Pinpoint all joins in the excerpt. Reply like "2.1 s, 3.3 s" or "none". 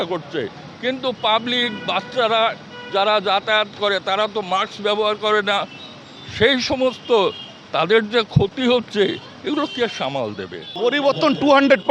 10.7 s